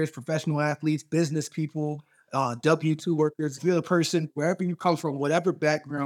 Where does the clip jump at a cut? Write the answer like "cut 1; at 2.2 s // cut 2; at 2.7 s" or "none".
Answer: cut 1; at 3.6 s